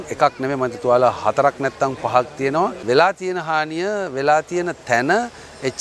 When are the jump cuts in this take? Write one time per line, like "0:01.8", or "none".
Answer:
0:02.8